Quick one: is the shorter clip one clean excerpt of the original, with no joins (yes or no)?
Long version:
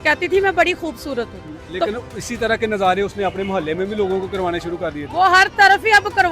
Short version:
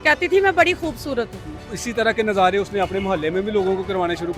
no